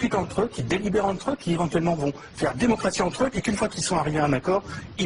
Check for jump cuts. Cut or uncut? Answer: uncut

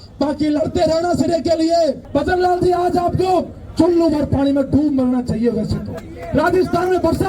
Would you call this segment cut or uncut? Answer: cut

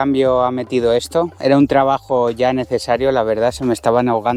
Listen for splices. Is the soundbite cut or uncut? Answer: uncut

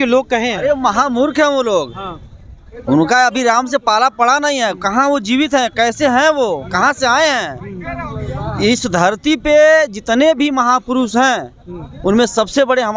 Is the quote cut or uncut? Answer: uncut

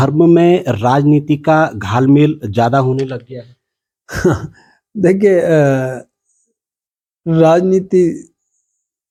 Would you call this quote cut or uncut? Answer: uncut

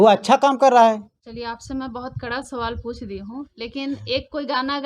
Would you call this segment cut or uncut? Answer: cut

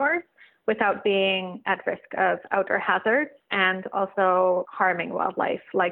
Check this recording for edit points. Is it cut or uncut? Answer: cut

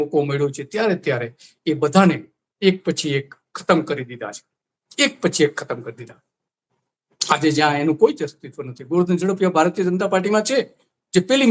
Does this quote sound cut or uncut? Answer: uncut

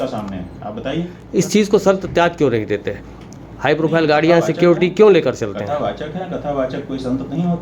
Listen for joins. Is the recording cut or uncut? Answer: cut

